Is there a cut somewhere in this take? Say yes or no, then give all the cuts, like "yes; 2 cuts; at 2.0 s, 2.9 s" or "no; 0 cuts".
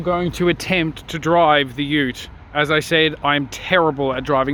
no; 0 cuts